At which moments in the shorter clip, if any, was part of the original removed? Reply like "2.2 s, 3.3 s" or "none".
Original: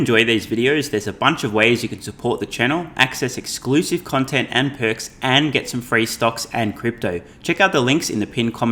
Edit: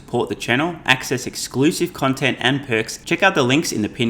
3.0 s